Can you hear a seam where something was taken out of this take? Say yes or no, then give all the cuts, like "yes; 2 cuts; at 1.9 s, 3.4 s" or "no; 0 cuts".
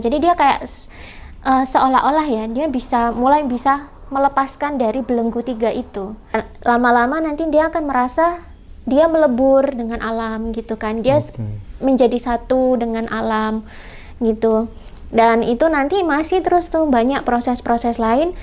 yes; 1 cut; at 6.3 s